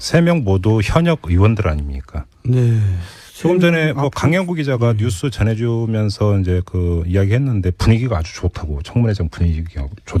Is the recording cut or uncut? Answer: uncut